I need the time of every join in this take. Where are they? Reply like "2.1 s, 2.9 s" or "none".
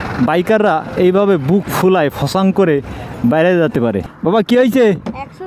4.1 s